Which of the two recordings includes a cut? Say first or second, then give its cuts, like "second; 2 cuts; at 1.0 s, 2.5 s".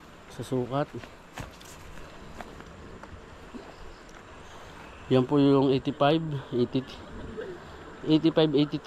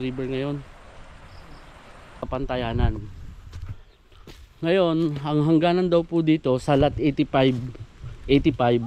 second; 1 cut; at 2.2 s